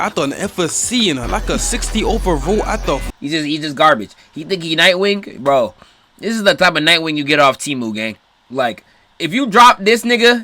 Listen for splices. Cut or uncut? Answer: cut